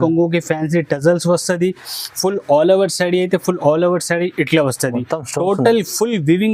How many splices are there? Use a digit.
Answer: 0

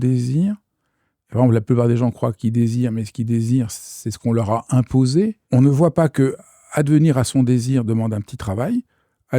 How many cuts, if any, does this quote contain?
1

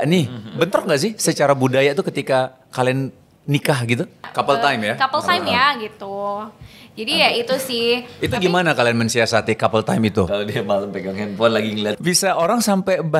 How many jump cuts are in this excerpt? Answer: 2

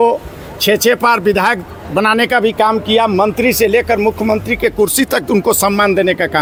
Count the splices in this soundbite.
0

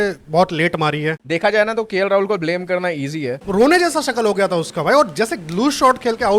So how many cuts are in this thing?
2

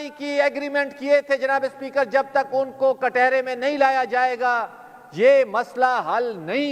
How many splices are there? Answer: 0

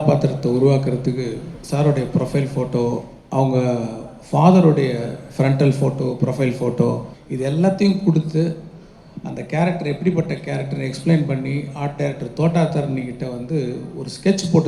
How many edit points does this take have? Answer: 2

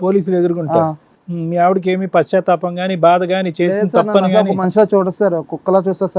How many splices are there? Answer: 1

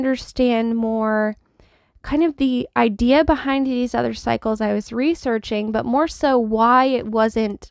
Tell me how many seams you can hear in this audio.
0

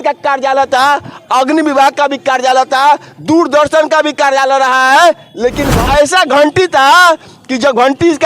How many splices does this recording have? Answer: 1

